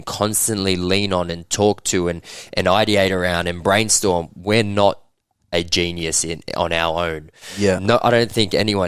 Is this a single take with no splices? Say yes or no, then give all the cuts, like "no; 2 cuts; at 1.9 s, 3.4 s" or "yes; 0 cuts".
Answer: yes; 0 cuts